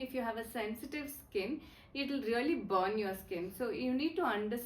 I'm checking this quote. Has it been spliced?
no; 0 cuts

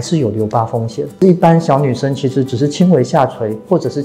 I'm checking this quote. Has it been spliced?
yes; 1 cut; at 1.2 s

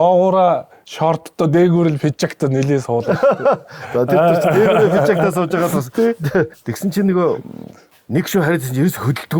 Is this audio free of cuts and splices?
no; 1 cut; at 6.5 s

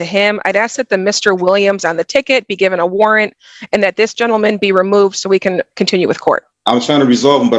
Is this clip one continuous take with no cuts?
no; 1 cut; at 6.5 s

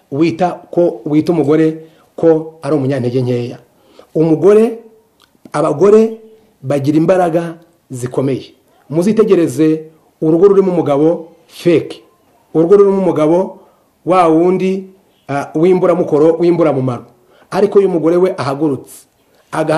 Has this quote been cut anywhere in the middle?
no; 0 cuts

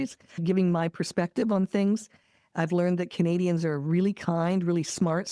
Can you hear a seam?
no; 0 cuts

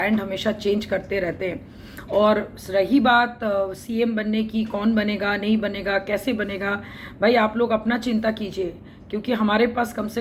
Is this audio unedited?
yes; 0 cuts

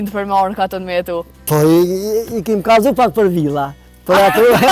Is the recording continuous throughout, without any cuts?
no; 1 cut; at 1.3 s

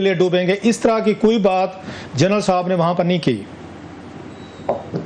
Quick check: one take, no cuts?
yes; 0 cuts

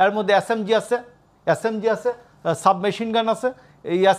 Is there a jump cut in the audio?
no; 0 cuts

